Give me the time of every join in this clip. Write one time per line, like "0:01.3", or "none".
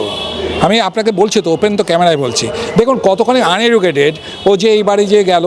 none